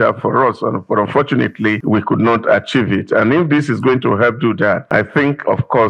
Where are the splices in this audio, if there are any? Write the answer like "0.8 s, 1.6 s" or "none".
1.8 s, 4.8 s